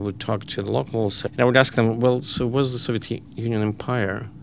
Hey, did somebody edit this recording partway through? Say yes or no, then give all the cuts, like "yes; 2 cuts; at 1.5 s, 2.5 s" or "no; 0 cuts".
yes; 1 cut; at 1.2 s